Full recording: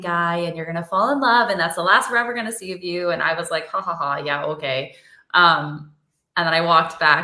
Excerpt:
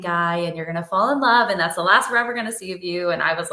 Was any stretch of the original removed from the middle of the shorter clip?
no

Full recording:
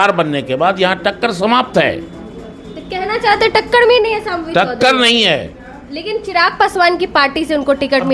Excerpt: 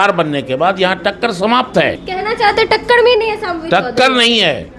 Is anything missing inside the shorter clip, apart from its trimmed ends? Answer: yes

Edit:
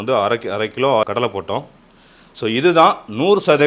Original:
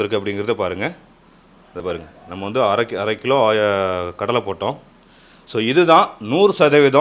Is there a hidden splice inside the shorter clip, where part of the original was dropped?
yes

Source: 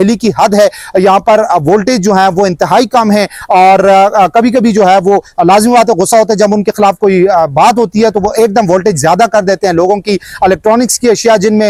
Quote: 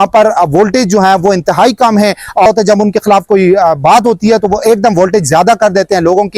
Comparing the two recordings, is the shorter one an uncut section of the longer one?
no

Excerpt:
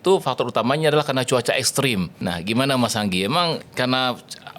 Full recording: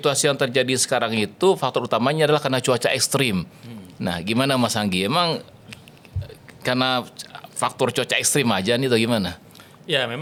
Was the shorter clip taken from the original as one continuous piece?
no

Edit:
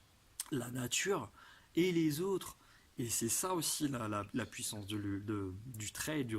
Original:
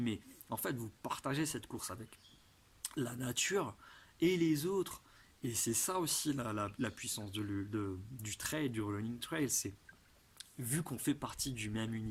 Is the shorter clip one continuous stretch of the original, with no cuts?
yes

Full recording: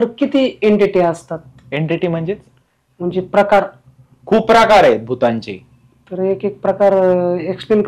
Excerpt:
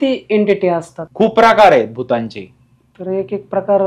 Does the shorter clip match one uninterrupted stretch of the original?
no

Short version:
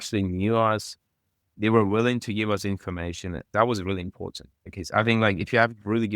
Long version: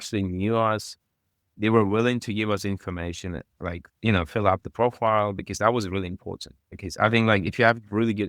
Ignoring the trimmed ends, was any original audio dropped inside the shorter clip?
yes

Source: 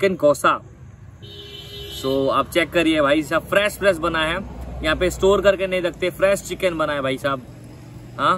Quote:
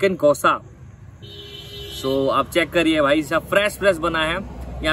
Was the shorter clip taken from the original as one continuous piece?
yes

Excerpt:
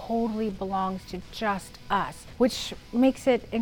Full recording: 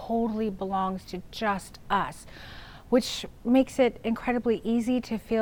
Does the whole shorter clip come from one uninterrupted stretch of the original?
no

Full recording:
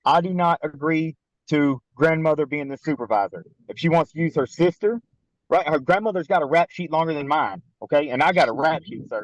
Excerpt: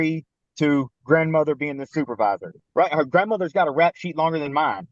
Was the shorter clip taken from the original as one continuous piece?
no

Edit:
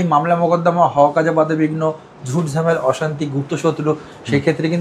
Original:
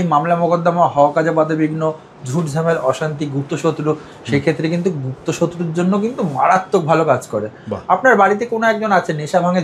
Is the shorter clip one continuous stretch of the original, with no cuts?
yes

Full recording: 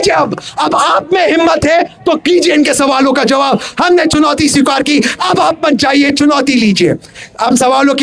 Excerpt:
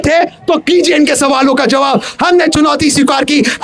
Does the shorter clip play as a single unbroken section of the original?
yes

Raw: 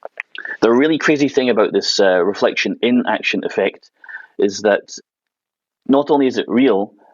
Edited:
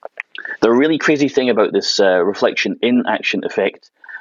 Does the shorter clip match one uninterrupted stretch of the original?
yes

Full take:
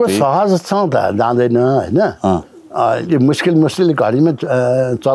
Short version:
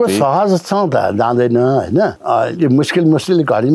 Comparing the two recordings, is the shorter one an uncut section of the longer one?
no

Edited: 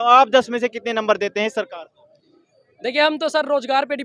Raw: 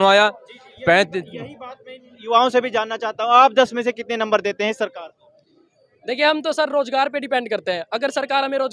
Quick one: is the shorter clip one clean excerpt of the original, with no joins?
yes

